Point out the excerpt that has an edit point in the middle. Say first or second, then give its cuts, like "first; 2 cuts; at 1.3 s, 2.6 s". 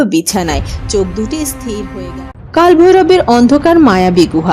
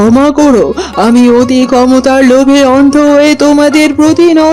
first; 1 cut; at 1.9 s